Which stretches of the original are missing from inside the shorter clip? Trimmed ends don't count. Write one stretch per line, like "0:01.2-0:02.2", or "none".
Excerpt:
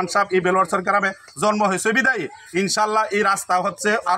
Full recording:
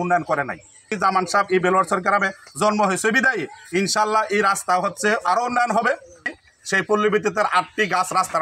none